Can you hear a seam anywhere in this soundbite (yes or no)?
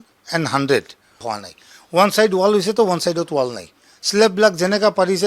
yes